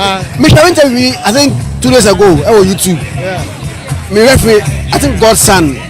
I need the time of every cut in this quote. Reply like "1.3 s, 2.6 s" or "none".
1.7 s